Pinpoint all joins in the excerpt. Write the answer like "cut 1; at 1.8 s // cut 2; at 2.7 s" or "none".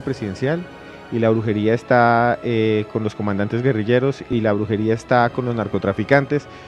cut 1; at 4.2 s